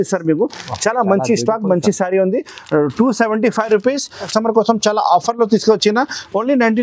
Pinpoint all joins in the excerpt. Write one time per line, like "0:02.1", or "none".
0:04.3